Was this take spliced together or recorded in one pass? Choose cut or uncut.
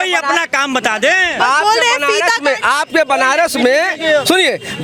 uncut